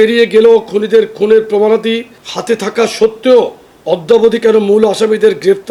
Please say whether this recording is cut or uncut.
uncut